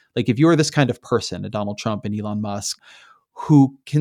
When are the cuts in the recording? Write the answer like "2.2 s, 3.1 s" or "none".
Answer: 2.8 s